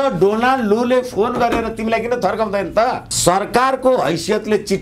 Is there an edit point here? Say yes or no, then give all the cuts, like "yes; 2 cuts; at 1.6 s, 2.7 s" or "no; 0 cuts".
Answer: yes; 1 cut; at 3.1 s